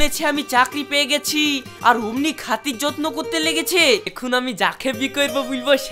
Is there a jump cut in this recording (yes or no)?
yes